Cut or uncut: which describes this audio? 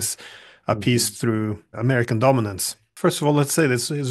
cut